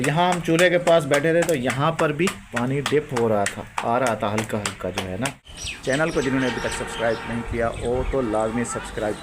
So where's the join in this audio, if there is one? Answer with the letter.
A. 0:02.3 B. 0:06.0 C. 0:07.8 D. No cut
B